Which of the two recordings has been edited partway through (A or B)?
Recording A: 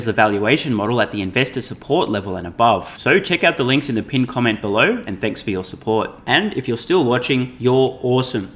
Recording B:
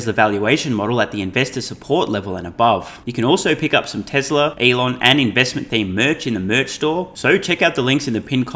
B